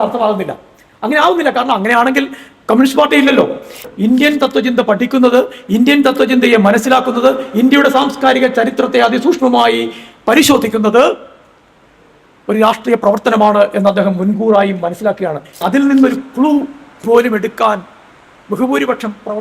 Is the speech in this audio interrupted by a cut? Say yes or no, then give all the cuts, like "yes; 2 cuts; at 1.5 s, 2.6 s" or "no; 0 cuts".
yes; 2 cuts; at 3.8 s, 15.5 s